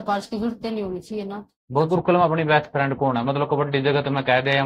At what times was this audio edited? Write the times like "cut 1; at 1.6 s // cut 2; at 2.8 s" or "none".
cut 1; at 1.9 s